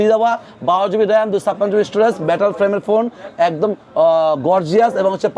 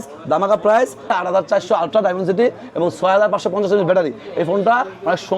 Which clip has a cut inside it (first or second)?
second